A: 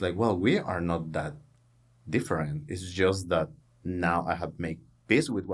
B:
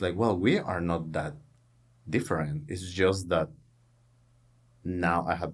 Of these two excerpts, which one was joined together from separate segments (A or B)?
A